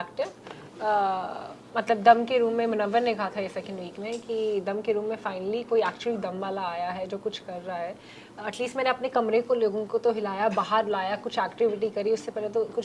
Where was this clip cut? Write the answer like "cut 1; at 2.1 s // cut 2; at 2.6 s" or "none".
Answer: none